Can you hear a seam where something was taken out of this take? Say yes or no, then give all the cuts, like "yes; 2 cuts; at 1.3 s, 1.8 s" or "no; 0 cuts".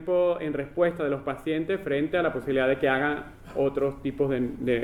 no; 0 cuts